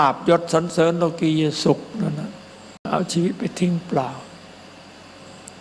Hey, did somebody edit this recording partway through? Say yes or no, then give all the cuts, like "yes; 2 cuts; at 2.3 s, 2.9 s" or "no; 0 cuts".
yes; 1 cut; at 2.8 s